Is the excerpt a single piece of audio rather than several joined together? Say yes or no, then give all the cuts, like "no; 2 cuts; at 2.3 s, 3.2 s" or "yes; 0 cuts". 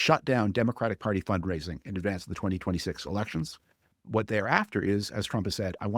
no; 1 cut; at 3.9 s